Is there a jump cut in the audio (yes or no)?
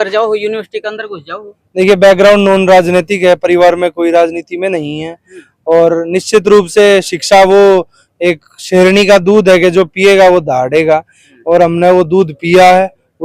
no